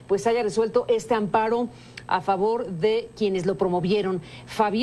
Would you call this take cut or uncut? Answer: uncut